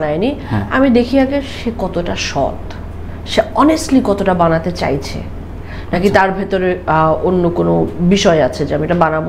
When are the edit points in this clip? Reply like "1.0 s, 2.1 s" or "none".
none